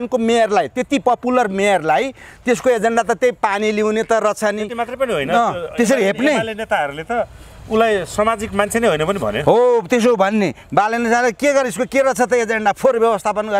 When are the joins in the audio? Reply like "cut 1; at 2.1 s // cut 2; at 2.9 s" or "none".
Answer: none

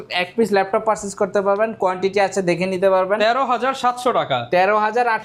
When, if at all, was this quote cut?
none

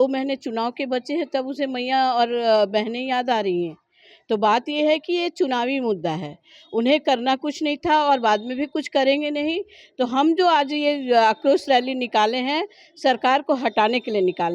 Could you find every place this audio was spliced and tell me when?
none

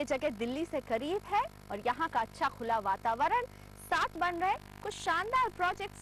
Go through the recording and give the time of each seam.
cut 1; at 4.2 s

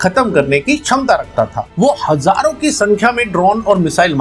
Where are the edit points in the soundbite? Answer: cut 1; at 1.6 s

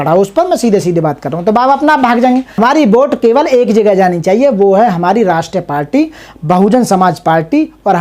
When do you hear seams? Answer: cut 1; at 2.5 s

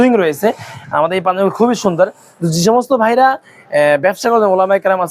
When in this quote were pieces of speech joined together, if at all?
none

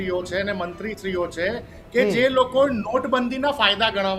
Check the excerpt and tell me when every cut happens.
none

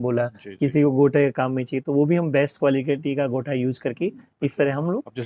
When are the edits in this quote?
none

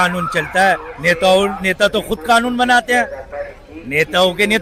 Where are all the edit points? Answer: none

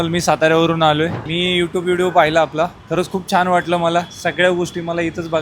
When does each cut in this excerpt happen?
cut 1; at 1.2 s

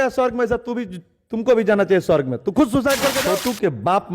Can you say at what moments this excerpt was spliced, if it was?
cut 1; at 3.2 s

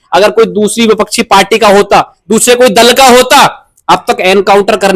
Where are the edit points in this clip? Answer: none

